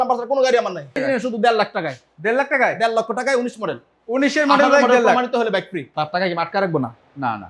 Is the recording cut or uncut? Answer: cut